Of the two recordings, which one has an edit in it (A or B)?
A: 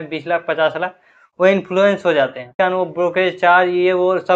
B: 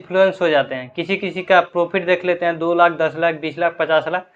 A